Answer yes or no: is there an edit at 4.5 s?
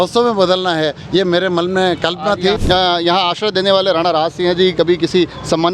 no